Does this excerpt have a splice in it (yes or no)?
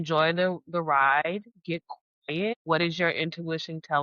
yes